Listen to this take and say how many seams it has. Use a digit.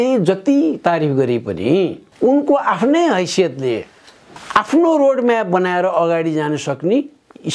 2